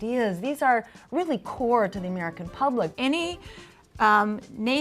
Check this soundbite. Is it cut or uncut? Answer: cut